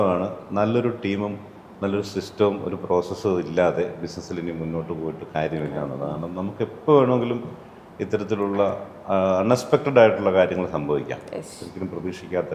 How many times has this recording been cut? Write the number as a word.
zero